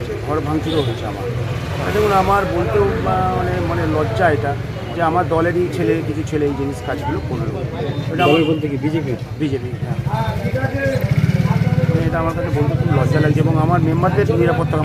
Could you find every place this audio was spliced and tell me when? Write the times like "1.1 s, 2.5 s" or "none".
none